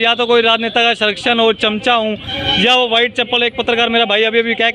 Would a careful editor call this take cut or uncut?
uncut